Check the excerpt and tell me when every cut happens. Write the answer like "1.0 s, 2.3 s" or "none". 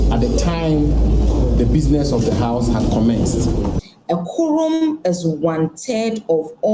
3.8 s